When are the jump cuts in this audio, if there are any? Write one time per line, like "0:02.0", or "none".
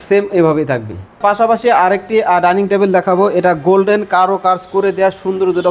0:01.2